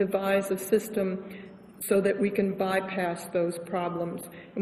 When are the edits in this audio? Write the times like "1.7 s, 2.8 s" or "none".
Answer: none